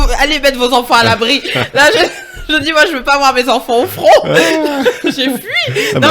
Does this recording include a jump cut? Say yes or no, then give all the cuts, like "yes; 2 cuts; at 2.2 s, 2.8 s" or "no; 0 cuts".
no; 0 cuts